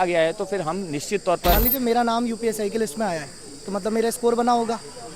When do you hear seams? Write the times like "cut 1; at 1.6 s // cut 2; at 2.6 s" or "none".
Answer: cut 1; at 1.6 s